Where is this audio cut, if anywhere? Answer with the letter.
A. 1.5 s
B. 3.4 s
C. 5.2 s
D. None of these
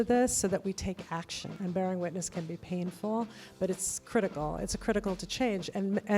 A